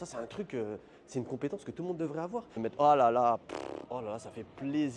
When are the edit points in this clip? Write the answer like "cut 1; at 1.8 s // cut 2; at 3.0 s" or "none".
cut 1; at 2.5 s